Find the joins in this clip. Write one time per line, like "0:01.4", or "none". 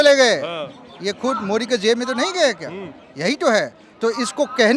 none